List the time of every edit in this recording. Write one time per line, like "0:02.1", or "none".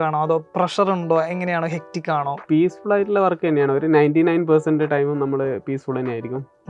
none